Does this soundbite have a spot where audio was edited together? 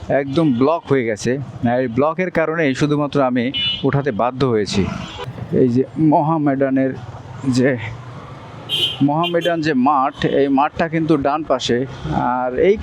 no; 0 cuts

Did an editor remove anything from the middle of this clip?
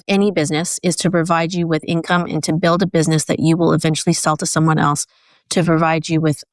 no; 0 cuts

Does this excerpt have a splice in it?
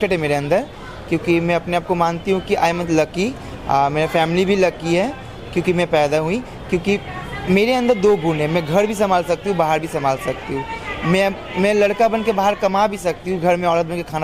no; 0 cuts

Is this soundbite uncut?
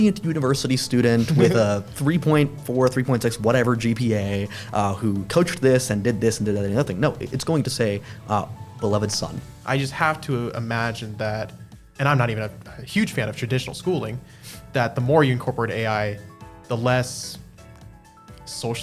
no; 1 cut; at 9.5 s

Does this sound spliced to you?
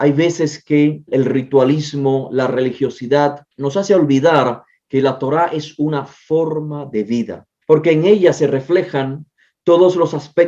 yes; 3 cuts; at 1.1 s, 3.5 s, 7.5 s

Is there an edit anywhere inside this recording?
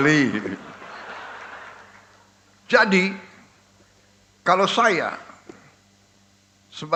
no; 0 cuts

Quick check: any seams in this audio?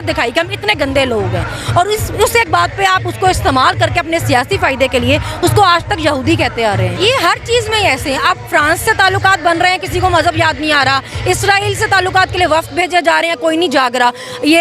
yes; 1 cut; at 6.9 s

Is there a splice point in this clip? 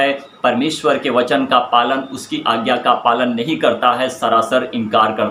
no; 0 cuts

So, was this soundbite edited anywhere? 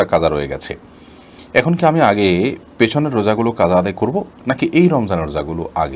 no; 0 cuts

